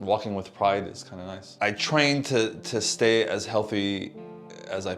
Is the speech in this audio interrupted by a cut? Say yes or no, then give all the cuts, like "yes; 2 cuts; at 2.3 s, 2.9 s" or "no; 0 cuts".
yes; 1 cut; at 1.5 s